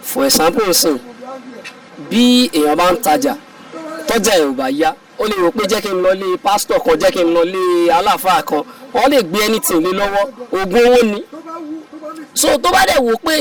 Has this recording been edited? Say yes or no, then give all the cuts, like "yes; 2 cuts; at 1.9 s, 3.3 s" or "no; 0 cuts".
no; 0 cuts